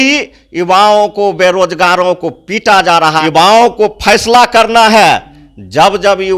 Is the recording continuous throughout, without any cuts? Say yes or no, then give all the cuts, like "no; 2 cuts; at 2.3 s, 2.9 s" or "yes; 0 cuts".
no; 1 cut; at 3.2 s